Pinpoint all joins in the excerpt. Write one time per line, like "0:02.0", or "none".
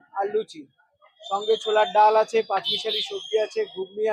none

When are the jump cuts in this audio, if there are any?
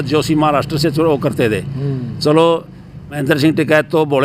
0:03.2

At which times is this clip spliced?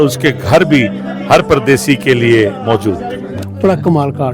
0:03.3

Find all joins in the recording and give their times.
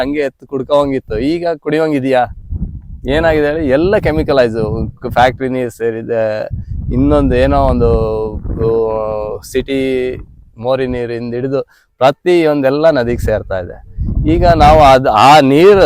none

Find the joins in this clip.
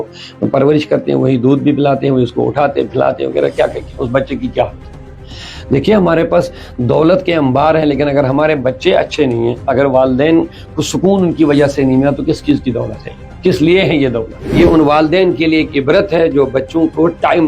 0:14.6

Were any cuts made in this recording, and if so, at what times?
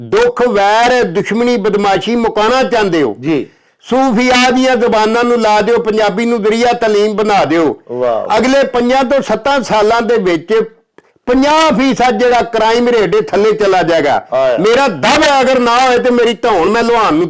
none

